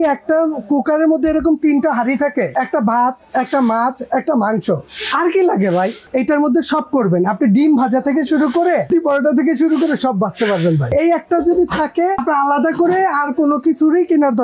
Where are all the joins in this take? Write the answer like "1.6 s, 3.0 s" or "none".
2.5 s, 6.0 s, 8.9 s, 10.9 s, 12.2 s